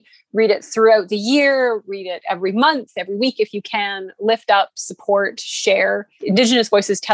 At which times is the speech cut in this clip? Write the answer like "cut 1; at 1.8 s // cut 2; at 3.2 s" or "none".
cut 1; at 6.1 s